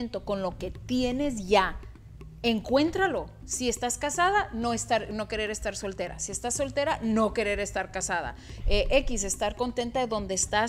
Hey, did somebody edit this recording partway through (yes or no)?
no